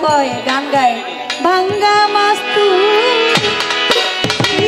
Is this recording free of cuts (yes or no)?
yes